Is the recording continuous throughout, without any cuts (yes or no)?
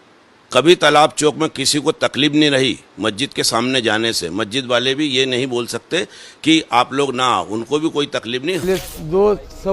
no